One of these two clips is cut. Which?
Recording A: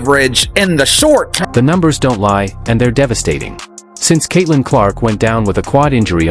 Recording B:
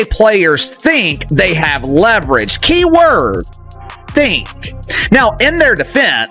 A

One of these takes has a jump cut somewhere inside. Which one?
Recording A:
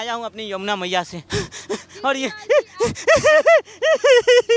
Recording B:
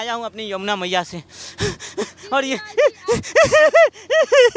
A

